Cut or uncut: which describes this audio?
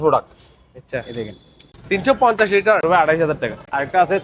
cut